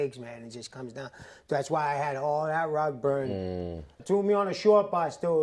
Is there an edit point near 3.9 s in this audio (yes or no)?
yes